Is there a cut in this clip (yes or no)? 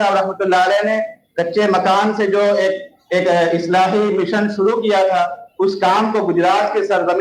no